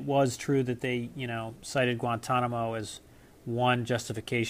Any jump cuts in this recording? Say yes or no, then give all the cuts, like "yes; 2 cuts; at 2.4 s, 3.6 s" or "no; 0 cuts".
no; 0 cuts